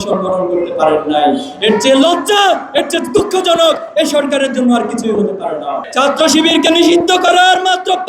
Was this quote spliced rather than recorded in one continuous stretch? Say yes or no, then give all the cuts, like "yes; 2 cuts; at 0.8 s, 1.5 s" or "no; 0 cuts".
yes; 1 cut; at 5.8 s